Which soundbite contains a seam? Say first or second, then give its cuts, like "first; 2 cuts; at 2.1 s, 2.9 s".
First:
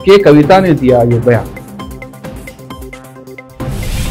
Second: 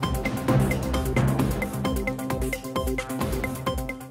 second; 2 cuts; at 1.6 s, 3.2 s